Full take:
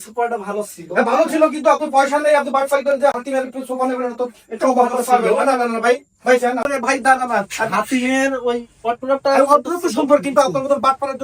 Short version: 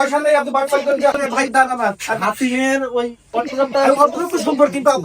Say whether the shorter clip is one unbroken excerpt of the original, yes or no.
no